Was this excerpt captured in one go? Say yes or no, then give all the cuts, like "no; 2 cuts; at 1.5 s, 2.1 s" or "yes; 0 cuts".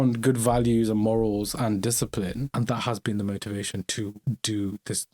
no; 2 cuts; at 2.5 s, 4.2 s